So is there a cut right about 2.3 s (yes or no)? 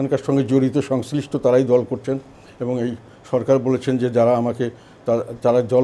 no